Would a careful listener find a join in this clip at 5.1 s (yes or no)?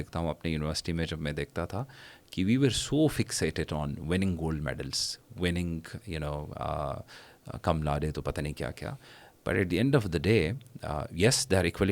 no